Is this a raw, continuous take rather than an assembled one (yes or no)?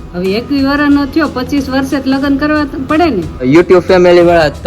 no